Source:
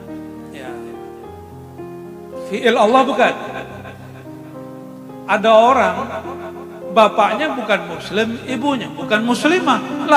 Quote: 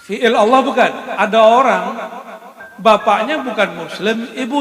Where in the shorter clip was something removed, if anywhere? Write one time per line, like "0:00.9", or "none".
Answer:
0:01.0